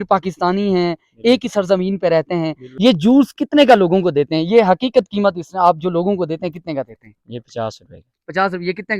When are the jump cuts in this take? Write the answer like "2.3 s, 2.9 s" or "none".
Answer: 2.6 s

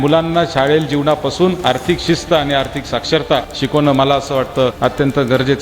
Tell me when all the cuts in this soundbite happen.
3.5 s, 4.8 s

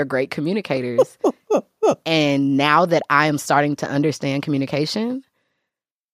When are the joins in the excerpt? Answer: none

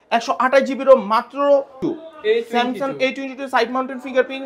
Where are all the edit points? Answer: 1.8 s

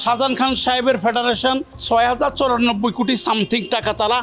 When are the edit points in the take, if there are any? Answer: 1.8 s

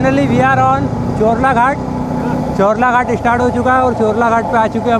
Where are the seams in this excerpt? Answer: none

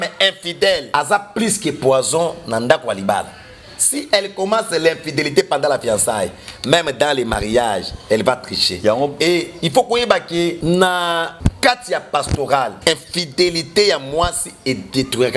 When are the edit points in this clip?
0.9 s, 10.6 s, 11.3 s, 12.8 s

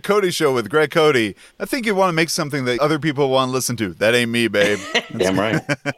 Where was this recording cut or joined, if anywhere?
2.8 s

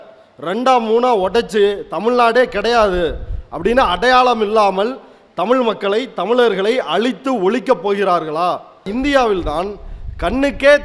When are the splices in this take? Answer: 8.9 s

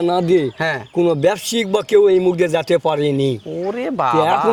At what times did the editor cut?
none

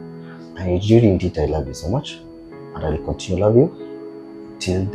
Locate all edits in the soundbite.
none

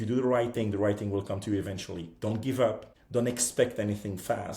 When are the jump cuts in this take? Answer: 2.9 s

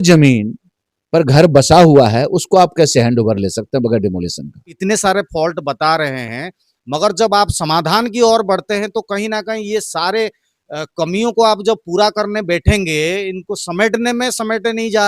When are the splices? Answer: 4.7 s

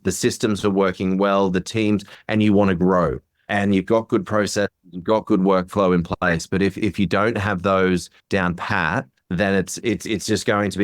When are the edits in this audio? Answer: 8.1 s, 9.2 s

